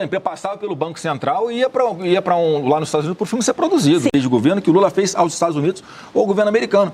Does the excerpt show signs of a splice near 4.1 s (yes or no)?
yes